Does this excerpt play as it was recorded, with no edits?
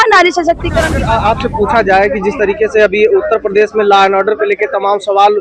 no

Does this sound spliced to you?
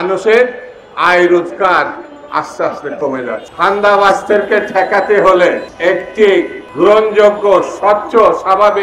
yes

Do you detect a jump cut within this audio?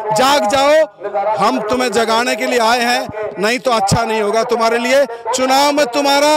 no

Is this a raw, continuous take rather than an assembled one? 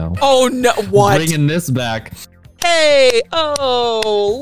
no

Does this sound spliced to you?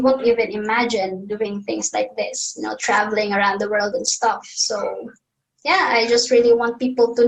no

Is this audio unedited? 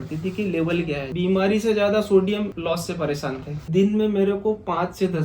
no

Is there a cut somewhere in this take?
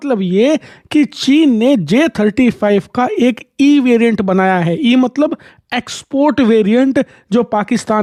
no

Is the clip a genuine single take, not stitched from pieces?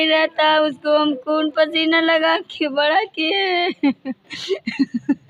yes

